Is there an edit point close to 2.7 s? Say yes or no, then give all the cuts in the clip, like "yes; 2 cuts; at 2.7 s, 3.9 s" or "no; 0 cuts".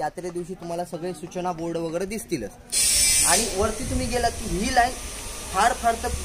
yes; 1 cut; at 2.7 s